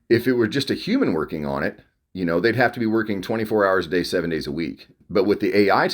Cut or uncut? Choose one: cut